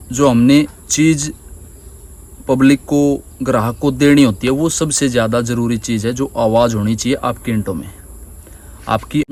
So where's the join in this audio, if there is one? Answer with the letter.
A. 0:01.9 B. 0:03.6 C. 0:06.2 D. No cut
D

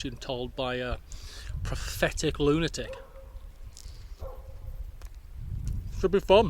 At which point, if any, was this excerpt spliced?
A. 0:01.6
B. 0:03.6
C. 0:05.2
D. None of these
D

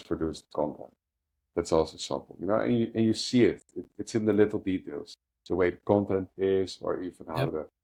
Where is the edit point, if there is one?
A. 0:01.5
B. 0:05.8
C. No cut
C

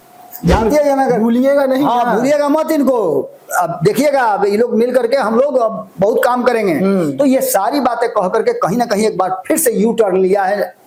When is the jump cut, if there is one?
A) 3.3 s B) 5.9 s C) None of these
C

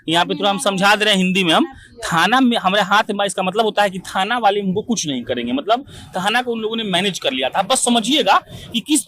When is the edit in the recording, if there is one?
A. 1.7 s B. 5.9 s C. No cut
C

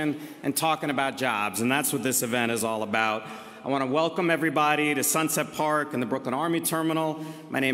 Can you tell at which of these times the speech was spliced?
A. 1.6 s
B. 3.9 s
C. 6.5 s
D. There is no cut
B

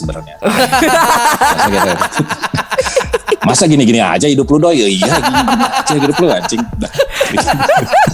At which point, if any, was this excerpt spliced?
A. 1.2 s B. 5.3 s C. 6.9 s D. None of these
D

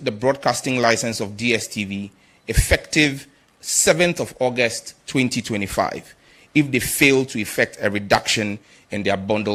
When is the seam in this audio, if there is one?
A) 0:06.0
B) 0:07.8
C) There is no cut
C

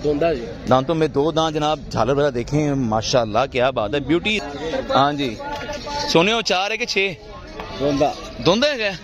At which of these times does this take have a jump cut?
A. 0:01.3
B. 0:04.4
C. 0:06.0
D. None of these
B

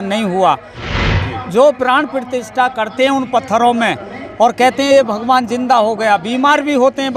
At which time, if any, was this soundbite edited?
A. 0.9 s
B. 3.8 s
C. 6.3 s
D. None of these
A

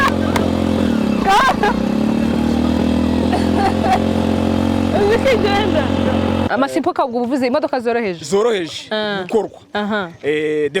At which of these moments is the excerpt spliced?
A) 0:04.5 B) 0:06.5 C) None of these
B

